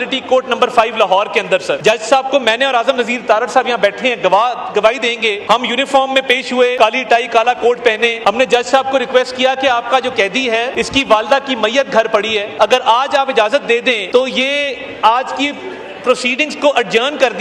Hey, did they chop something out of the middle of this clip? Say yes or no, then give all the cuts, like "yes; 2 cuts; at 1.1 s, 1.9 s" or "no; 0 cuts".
yes; 7 cuts; at 1.8 s, 5.4 s, 6.7 s, 8.2 s, 10.7 s, 12.4 s, 14.0 s